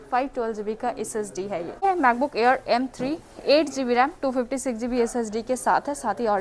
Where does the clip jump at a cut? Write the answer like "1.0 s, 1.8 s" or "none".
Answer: 1.8 s